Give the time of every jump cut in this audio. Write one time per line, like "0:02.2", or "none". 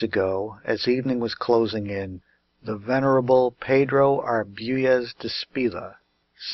0:04.5

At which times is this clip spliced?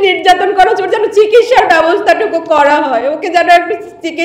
none

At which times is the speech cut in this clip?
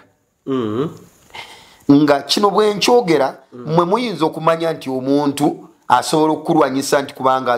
none

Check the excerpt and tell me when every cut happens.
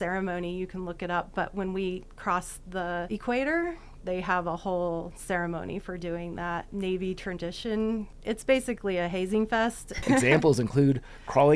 0:03.1
0:06.7
0:08.1
0:10.0

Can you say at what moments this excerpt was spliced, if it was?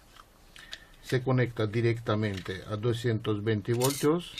0:03.0

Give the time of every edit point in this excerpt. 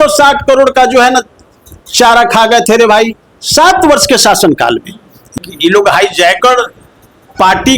0:05.3

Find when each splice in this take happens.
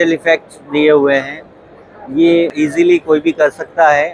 0:02.5

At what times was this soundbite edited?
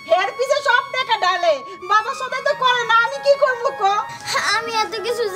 0:04.2

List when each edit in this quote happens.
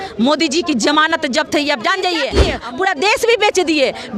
0:02.5

